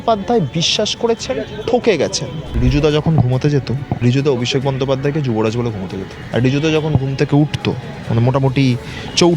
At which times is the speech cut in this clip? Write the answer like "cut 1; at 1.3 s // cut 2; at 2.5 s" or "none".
cut 1; at 2.4 s // cut 2; at 3.9 s // cut 3; at 6.2 s // cut 4; at 7.9 s

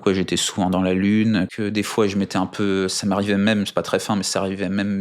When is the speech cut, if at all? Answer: cut 1; at 1.5 s

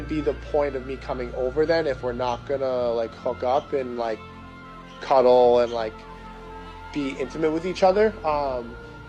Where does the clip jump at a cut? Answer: cut 1; at 1.5 s // cut 2; at 5.7 s

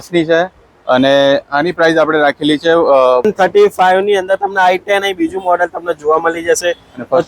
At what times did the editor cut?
cut 1; at 3.2 s

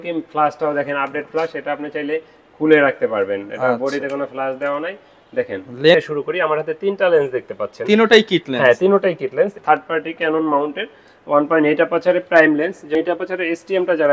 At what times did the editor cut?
cut 1; at 5.9 s // cut 2; at 9.6 s // cut 3; at 12.9 s

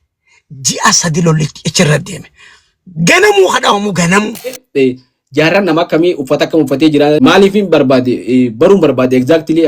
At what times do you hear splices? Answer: cut 1; at 4.6 s // cut 2; at 7.2 s

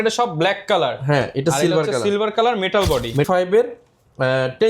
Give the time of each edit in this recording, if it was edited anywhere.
cut 1; at 3.3 s

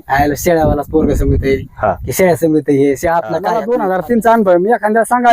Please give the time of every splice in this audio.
cut 1; at 3.5 s

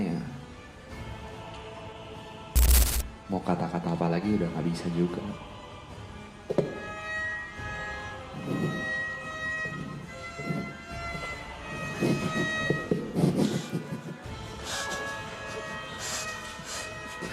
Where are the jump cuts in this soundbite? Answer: none

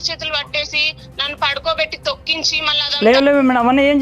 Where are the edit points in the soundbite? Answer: cut 1; at 2.7 s

